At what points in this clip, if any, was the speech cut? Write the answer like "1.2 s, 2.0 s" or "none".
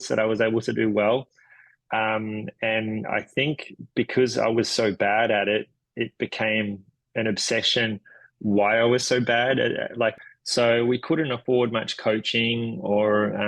10.2 s